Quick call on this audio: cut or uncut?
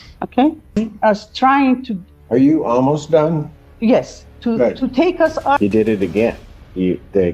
cut